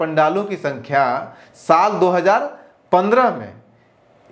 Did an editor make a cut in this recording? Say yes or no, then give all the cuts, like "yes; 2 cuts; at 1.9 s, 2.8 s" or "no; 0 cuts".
no; 0 cuts